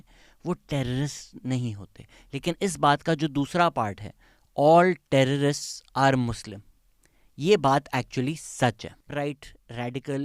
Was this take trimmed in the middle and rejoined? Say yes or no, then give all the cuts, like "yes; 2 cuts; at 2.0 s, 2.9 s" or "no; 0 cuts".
yes; 1 cut; at 8.9 s